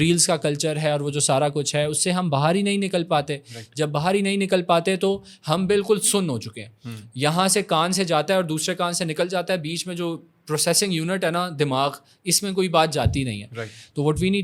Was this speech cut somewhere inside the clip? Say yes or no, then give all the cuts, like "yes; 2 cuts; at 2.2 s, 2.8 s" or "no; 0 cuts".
no; 0 cuts